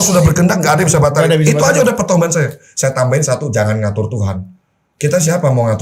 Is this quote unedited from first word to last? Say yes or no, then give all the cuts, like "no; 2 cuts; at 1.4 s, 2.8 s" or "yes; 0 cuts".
yes; 0 cuts